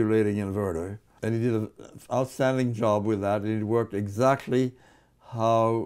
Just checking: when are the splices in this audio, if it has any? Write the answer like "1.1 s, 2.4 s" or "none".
1.0 s